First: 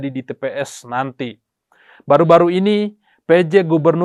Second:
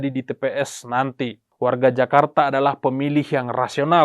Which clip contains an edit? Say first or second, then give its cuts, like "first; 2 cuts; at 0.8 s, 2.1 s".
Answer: second; 1 cut; at 1.4 s